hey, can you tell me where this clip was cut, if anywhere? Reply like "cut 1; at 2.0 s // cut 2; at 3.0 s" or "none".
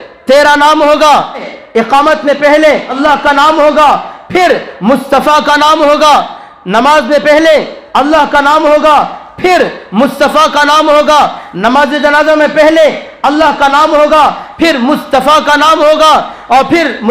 cut 1; at 1.5 s // cut 2; at 2.9 s